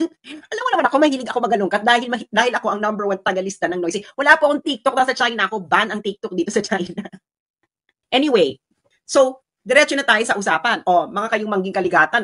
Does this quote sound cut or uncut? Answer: cut